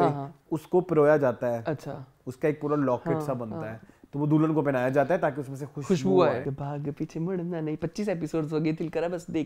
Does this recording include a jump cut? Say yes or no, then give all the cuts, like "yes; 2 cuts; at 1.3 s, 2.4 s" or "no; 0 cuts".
yes; 1 cut; at 6.4 s